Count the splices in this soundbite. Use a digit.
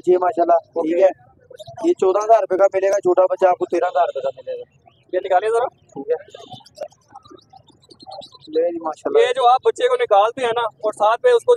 0